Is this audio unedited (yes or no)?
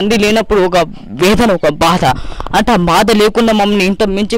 yes